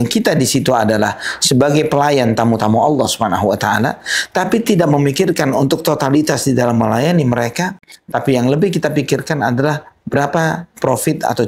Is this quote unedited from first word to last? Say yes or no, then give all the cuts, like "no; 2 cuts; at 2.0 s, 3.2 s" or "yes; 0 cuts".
yes; 0 cuts